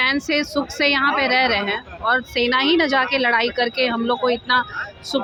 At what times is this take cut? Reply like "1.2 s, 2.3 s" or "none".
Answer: none